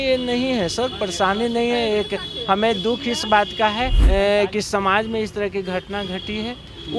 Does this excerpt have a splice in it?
yes; 1 cut; at 4.0 s

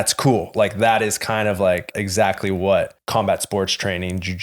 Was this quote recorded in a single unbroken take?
no; 2 cuts; at 2.0 s, 3.0 s

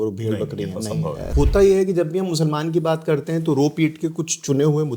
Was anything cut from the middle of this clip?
yes; 1 cut; at 1.3 s

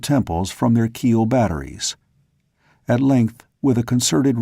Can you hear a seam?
yes; 1 cut; at 1.1 s

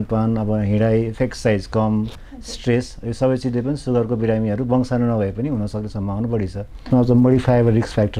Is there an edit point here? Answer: yes; 1 cut; at 6.9 s

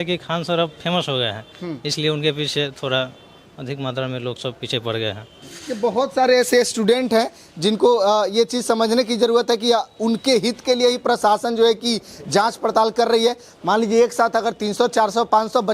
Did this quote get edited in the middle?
no; 0 cuts

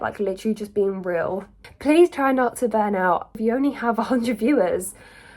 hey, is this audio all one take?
no; 2 cuts; at 1.6 s, 3.3 s

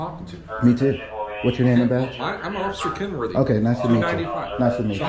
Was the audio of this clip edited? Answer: no; 0 cuts

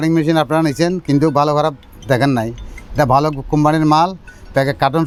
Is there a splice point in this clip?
no; 0 cuts

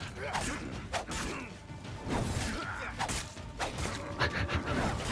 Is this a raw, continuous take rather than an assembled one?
yes; 0 cuts

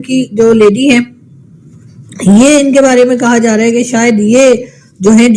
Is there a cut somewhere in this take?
no; 0 cuts

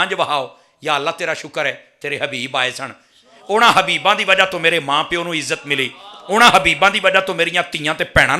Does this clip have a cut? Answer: no; 0 cuts

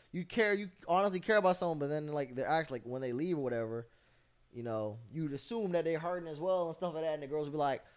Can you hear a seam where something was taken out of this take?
no; 0 cuts

